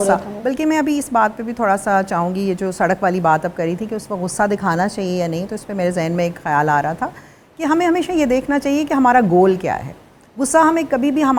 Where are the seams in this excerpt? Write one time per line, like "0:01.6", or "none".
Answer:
none